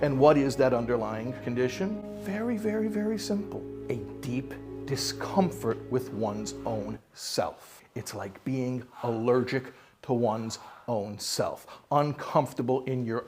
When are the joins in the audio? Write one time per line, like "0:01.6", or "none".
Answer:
0:02.0